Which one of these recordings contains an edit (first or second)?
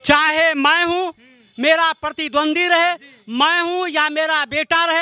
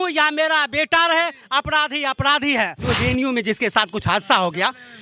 second